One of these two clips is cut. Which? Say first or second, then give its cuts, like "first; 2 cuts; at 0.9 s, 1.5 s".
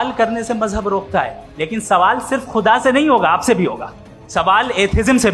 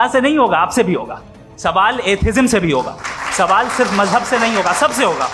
first; 1 cut; at 1.5 s